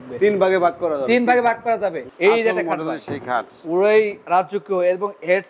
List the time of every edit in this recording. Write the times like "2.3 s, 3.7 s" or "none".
2.1 s